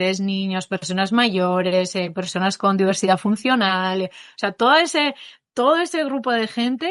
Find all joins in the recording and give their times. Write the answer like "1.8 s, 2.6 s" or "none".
none